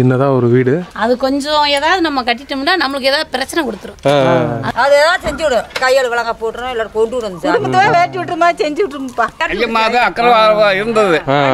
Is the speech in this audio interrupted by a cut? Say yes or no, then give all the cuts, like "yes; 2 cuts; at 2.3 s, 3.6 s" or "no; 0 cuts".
yes; 3 cuts; at 0.9 s, 4.6 s, 9.4 s